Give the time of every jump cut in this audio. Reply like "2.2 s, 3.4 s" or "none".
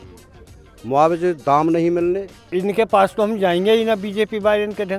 2.5 s